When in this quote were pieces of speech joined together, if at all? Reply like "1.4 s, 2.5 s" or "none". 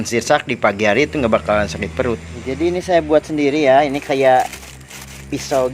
2.3 s